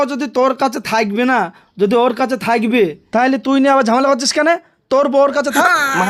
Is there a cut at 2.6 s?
no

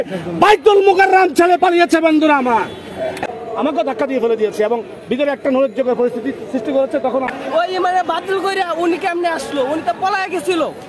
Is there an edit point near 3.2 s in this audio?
yes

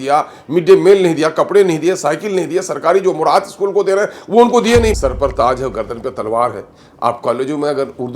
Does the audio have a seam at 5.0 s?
yes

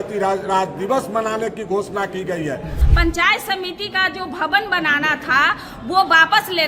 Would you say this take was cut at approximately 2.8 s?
yes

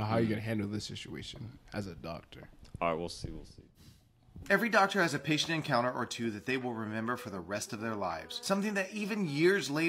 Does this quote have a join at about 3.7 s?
no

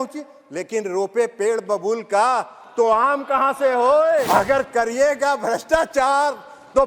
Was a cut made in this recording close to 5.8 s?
no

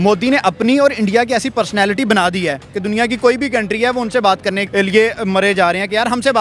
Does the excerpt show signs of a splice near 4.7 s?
yes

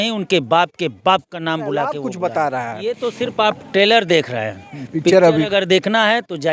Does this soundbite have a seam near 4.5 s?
no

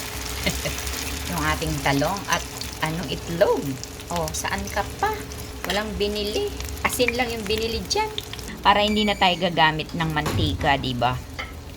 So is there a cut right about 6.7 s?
yes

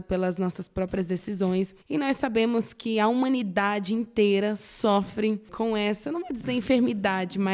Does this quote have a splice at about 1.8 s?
yes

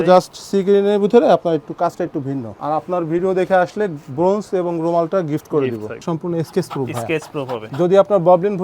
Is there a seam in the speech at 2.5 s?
yes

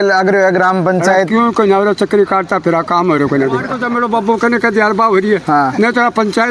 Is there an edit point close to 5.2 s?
no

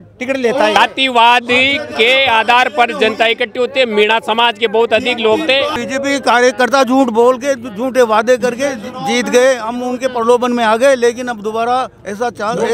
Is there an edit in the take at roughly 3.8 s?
no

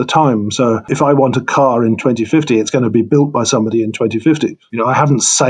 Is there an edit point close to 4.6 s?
yes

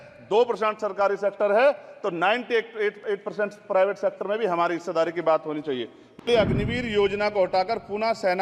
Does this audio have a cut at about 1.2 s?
no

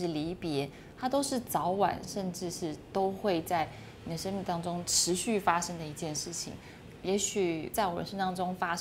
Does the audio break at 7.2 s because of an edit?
no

